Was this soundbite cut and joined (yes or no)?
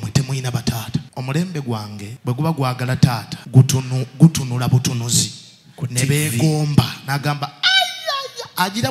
yes